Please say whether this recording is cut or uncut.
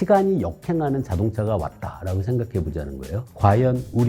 uncut